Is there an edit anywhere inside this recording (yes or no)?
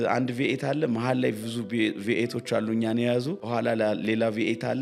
yes